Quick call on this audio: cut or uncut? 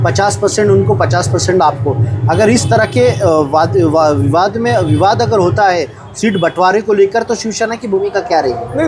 uncut